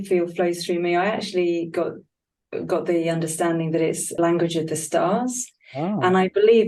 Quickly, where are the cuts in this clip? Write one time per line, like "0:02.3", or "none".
0:04.1